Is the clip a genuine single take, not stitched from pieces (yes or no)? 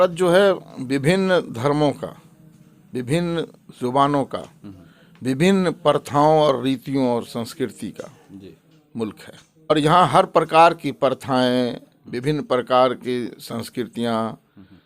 no